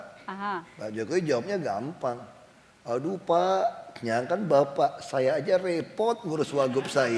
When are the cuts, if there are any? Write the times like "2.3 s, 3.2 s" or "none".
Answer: none

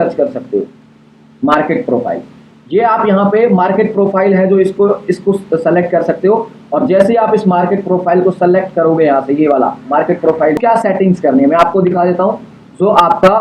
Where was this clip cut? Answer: 10.6 s

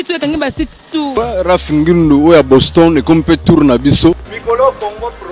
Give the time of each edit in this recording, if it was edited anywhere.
1.1 s, 4.3 s

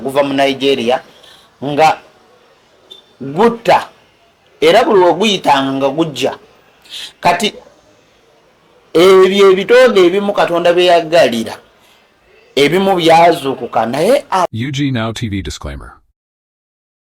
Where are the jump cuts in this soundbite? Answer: 14.5 s

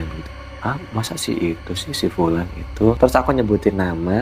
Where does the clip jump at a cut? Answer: none

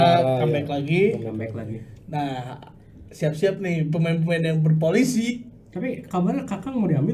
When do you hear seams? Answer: none

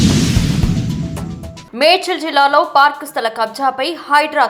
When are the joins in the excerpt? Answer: none

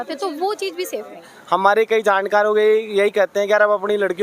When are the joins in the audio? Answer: 1.3 s

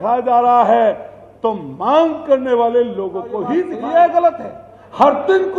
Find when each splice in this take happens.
3.8 s

